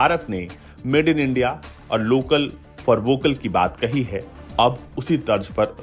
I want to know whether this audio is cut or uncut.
uncut